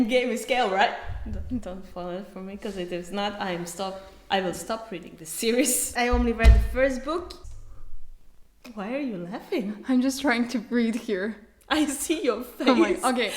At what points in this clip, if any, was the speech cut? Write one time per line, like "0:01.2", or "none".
0:05.9
0:07.4